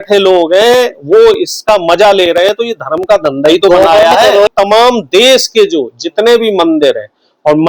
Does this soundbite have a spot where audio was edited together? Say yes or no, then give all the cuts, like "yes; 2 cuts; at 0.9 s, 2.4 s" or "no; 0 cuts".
yes; 1 cut; at 4.5 s